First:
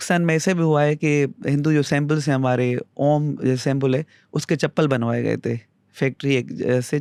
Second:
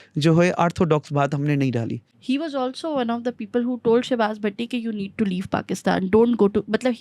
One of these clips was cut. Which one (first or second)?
second